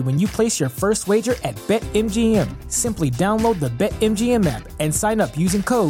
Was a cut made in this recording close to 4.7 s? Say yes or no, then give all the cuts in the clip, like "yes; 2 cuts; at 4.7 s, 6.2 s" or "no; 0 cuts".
no; 0 cuts